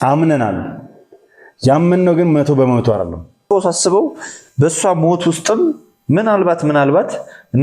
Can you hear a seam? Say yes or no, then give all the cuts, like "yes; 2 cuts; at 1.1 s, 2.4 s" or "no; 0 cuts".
yes; 1 cut; at 3.5 s